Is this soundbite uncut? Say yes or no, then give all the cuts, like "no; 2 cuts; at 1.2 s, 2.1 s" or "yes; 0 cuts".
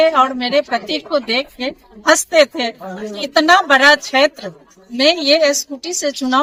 yes; 0 cuts